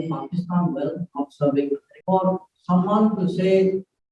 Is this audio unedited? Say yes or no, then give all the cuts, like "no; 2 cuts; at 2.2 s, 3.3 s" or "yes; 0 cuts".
no; 1 cut; at 1.9 s